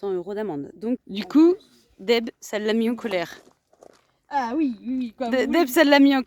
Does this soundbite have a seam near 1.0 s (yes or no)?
yes